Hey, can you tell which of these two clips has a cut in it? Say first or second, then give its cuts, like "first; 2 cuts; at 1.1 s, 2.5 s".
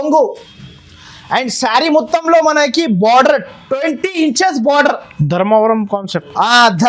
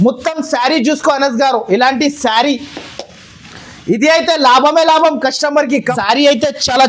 second; 1 cut; at 5.9 s